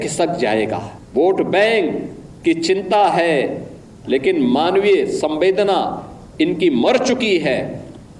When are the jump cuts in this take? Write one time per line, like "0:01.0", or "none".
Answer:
0:01.0